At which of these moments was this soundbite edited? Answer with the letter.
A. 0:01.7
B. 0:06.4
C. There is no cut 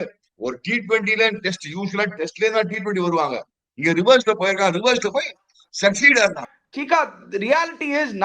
B